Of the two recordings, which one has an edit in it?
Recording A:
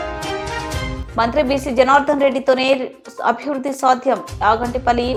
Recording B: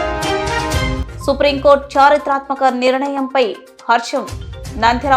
B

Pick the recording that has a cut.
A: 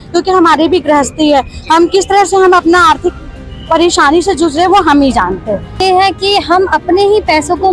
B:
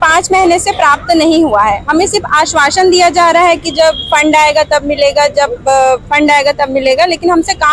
A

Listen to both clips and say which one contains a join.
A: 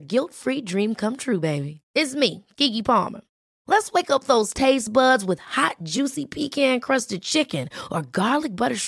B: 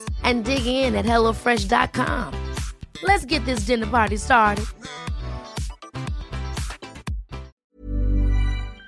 B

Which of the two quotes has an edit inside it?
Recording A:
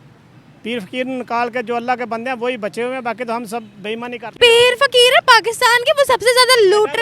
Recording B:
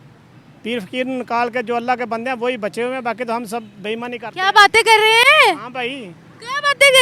A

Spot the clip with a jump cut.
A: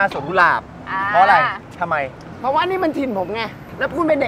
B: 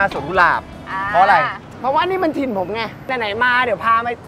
B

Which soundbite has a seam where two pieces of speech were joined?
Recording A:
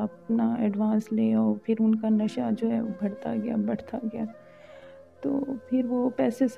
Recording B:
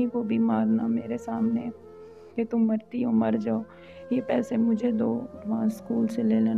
B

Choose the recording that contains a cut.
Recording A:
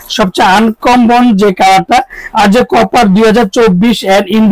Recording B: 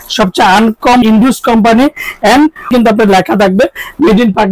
B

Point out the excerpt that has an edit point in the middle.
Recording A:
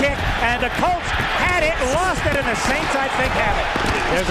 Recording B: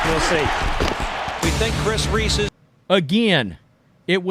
B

